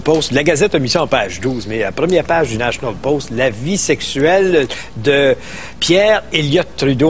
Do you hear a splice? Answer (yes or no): no